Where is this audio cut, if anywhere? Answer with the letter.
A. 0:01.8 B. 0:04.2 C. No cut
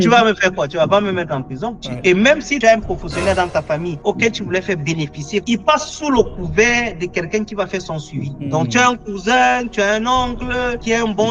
A